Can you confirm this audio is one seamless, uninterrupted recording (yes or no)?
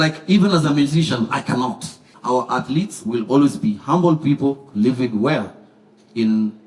no